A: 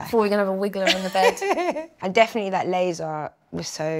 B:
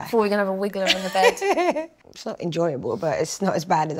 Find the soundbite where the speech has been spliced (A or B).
A